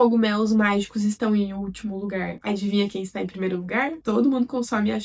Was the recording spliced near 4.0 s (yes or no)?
yes